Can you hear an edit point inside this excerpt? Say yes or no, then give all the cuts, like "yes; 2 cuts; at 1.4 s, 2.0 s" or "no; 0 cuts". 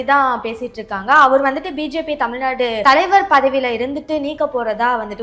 yes; 1 cut; at 2.8 s